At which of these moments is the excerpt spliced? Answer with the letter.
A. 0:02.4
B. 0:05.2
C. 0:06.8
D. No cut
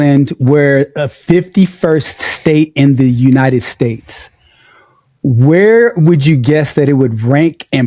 D